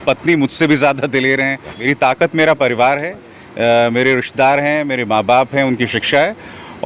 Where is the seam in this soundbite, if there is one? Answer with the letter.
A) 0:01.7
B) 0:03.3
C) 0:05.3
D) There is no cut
A